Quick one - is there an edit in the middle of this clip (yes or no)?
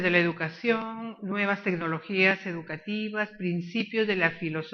no